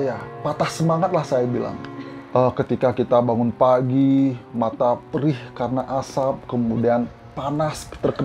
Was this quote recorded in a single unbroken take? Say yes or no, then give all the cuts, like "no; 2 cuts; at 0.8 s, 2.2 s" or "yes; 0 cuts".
yes; 0 cuts